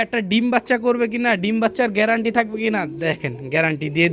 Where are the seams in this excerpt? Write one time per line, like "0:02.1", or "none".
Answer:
none